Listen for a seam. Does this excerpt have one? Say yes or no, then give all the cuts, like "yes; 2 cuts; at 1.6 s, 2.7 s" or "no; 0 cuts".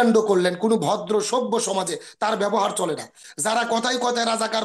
yes; 1 cut; at 3.2 s